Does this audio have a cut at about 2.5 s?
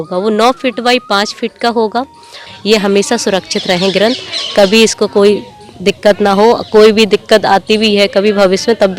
yes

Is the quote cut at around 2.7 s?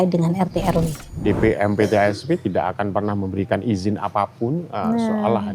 no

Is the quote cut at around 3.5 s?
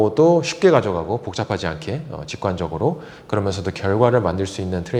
no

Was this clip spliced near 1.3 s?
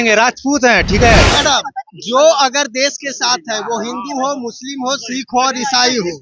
yes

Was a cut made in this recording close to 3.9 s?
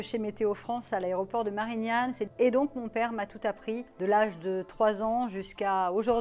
yes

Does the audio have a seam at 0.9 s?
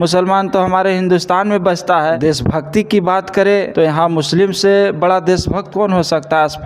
no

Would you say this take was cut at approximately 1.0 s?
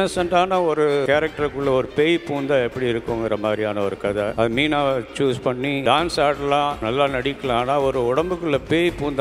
yes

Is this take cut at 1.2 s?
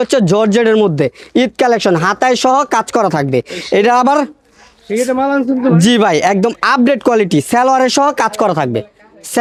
no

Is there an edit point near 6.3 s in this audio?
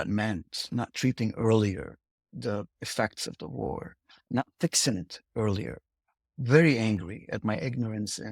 no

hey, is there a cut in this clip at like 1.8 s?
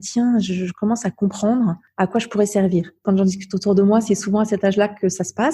yes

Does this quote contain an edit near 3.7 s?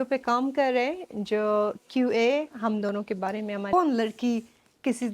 yes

